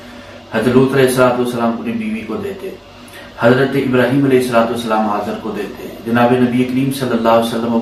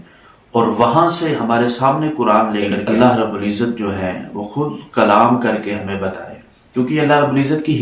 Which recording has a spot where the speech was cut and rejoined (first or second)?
second